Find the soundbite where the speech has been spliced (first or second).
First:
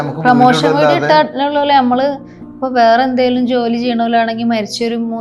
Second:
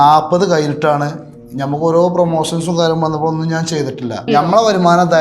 second